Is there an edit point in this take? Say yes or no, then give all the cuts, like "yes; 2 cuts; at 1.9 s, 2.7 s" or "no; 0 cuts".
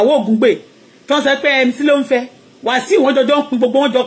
no; 0 cuts